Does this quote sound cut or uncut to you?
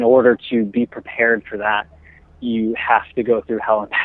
uncut